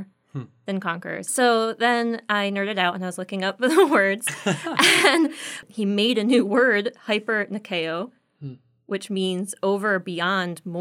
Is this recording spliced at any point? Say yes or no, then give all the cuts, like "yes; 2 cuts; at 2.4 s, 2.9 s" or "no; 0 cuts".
yes; 2 cuts; at 1.2 s, 5.6 s